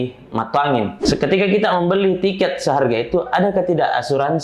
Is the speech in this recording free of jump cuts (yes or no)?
no